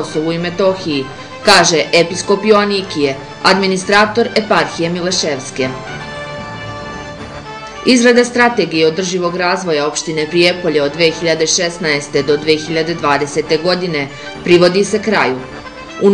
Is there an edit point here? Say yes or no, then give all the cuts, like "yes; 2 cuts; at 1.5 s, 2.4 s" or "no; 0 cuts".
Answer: no; 0 cuts